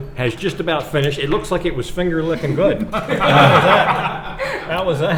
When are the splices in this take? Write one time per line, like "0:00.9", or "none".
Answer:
none